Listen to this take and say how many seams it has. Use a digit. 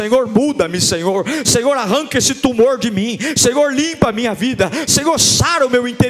0